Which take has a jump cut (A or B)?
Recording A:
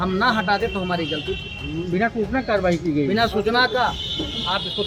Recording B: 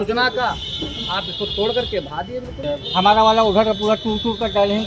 B